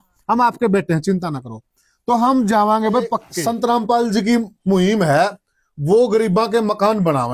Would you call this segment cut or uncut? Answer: cut